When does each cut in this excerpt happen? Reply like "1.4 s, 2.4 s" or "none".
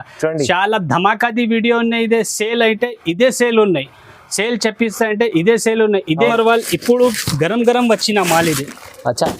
6.3 s